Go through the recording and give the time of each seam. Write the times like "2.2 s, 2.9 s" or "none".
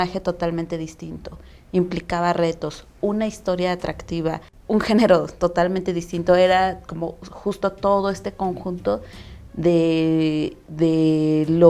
4.5 s